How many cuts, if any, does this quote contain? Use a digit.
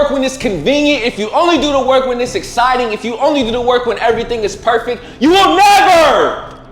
0